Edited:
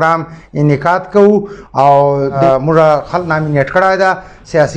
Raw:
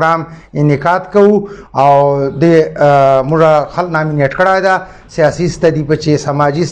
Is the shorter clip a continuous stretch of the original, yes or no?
no